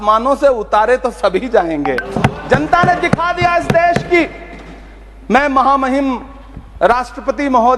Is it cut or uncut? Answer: uncut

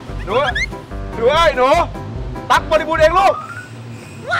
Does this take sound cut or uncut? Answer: uncut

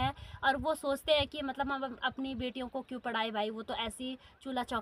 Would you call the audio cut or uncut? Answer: uncut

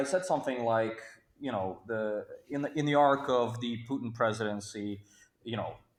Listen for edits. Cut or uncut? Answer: uncut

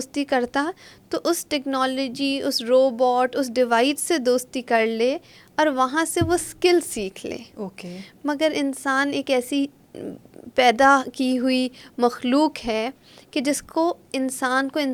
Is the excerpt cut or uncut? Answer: uncut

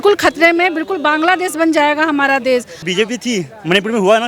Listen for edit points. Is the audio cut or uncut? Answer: cut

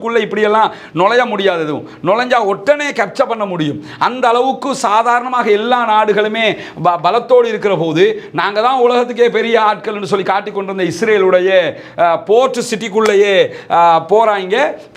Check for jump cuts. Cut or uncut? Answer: uncut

